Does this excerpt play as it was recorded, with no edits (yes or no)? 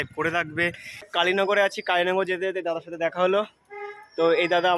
no